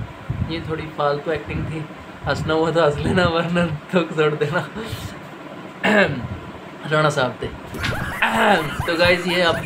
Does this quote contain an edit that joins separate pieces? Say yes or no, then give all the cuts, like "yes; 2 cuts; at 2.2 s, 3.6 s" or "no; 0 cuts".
no; 0 cuts